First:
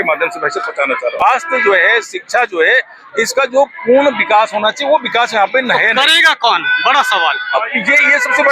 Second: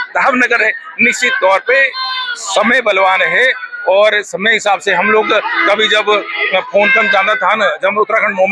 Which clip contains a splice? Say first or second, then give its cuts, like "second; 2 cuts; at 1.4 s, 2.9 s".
first; 1 cut; at 1.2 s